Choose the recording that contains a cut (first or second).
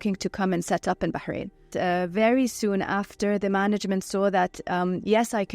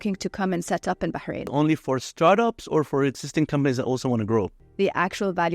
second